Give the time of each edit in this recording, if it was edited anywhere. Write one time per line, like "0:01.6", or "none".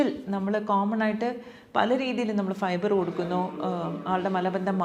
none